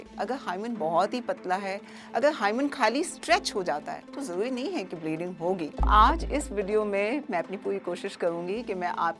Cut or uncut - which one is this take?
cut